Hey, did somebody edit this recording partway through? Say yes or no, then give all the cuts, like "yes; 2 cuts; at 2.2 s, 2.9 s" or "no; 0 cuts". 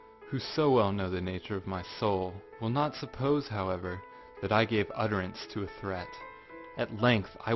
yes; 1 cut; at 4.8 s